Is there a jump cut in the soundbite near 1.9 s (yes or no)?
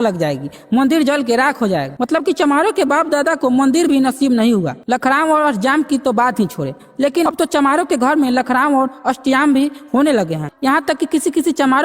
yes